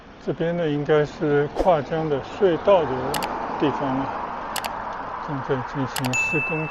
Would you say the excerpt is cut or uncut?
uncut